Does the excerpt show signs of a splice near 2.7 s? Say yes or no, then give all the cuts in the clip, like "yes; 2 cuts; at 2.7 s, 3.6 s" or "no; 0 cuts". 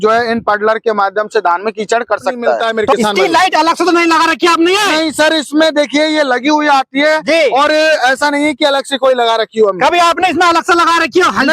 yes; 1 cut; at 2.7 s